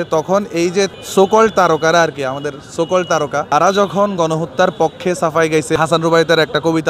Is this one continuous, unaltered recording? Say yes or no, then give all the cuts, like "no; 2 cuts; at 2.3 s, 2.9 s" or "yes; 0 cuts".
no; 3 cuts; at 1.0 s, 3.5 s, 5.8 s